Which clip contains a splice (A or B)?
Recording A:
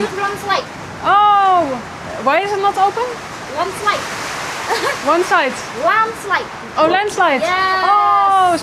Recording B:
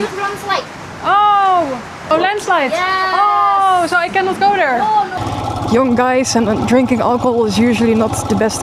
B